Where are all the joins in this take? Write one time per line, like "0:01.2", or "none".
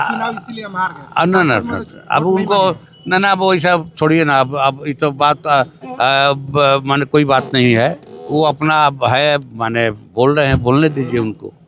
none